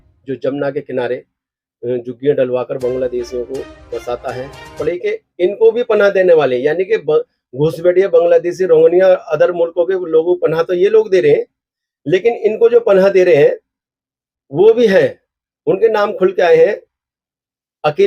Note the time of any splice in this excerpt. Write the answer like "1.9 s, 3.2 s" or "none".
4.8 s